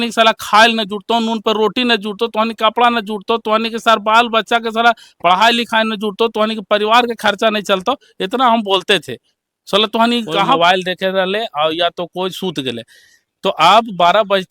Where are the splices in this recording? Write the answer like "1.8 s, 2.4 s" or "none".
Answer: 10.6 s